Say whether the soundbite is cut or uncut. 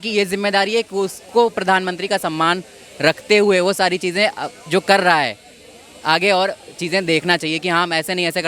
uncut